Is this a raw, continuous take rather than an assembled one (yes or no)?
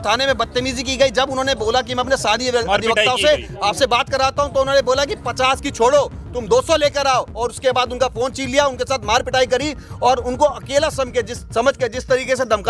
yes